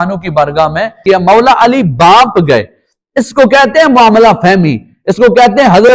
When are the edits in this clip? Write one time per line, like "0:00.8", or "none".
0:01.0

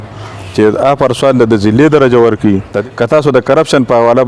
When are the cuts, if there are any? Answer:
0:02.7

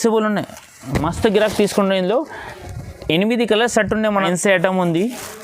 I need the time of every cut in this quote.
0:04.2

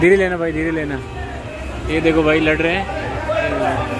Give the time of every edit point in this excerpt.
none

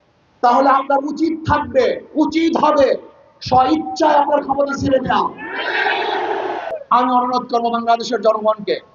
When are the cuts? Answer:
0:06.7

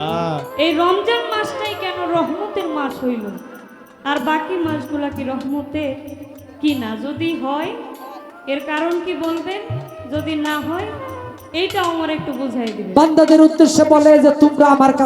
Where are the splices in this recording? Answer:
0:12.8

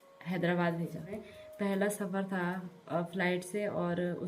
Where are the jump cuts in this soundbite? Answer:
0:01.2

